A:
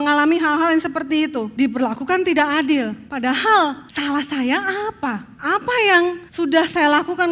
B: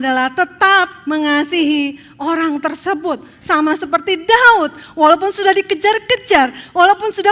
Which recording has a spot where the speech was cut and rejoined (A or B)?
A